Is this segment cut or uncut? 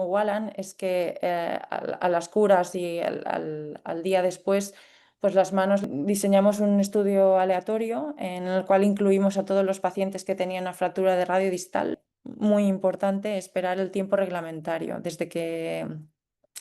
cut